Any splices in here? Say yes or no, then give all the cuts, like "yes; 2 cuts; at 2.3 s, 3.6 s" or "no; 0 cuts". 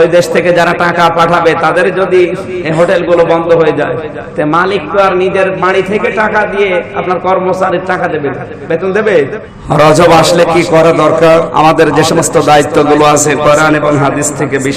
yes; 2 cuts; at 9.5 s, 11.5 s